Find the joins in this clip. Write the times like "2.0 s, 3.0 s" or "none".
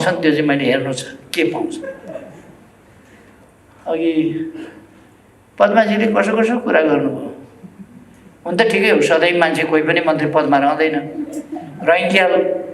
3.4 s

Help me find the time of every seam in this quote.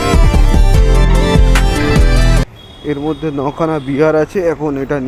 2.5 s

